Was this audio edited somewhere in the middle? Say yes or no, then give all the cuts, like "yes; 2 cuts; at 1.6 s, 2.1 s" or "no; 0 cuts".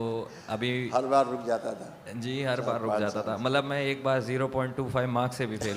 no; 0 cuts